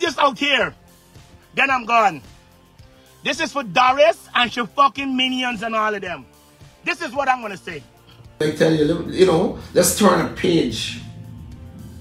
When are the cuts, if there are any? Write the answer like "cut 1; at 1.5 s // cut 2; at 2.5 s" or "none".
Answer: cut 1; at 8.4 s

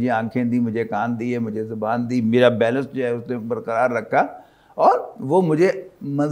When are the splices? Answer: none

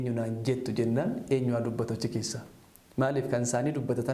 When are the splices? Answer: none

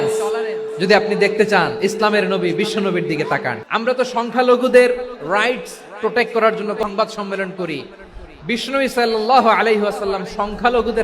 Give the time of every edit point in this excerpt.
cut 1; at 3.6 s // cut 2; at 6.8 s

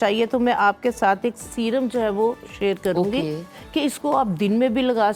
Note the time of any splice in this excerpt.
none

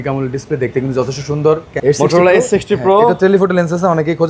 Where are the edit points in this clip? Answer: cut 1; at 1.7 s

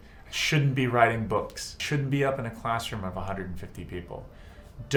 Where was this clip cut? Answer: none

